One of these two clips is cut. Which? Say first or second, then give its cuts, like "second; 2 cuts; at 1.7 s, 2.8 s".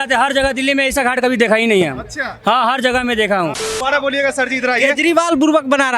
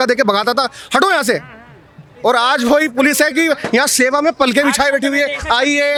first; 1 cut; at 3.7 s